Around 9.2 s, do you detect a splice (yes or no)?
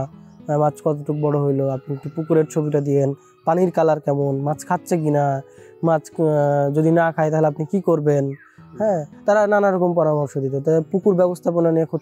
no